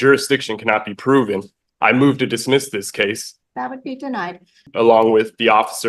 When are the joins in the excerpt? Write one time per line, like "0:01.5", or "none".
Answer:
0:03.3
0:04.7